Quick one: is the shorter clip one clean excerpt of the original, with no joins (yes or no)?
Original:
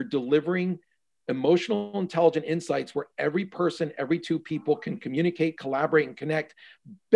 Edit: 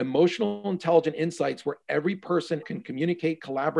no